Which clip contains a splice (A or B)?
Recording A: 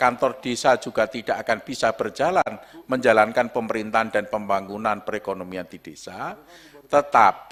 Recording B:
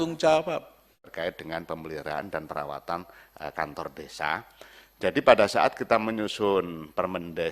B